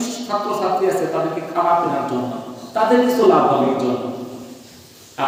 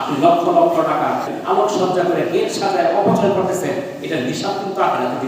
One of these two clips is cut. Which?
second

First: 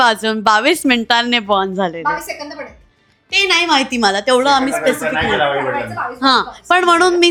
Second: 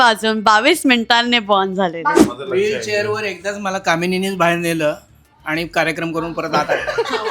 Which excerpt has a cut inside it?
second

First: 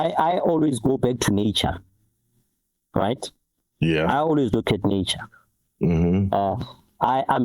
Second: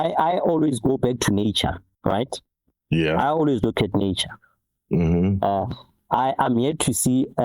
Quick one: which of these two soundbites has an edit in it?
second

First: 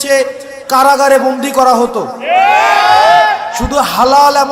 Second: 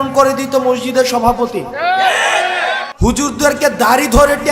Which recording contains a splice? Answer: second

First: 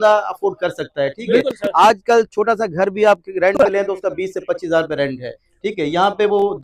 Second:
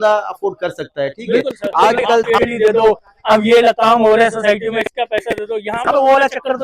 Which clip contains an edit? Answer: second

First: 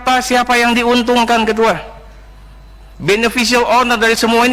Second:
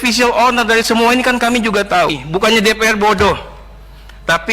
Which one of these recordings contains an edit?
second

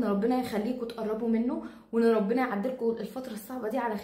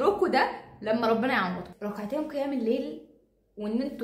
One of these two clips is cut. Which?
second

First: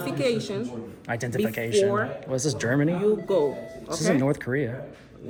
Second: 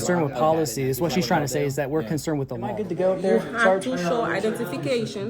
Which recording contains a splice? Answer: second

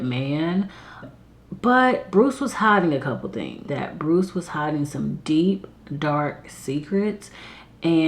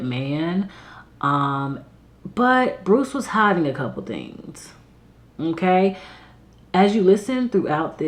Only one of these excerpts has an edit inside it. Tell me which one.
first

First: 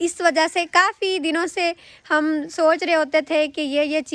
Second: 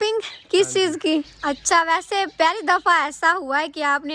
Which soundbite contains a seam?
second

